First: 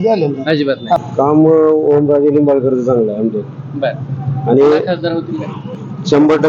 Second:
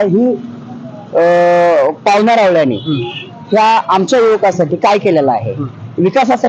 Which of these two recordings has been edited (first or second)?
first